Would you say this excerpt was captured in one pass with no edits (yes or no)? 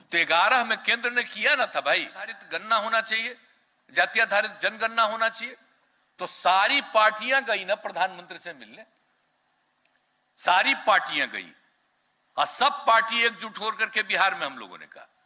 no